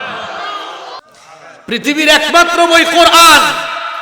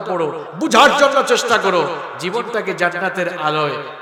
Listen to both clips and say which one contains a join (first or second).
first